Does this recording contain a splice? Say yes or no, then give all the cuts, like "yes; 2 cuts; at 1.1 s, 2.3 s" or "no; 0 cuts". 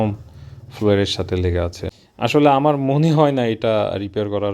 yes; 1 cut; at 2.3 s